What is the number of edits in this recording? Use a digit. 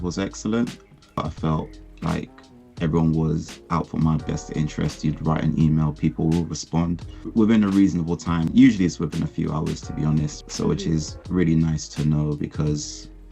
4